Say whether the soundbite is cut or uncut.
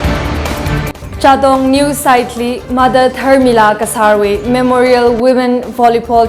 cut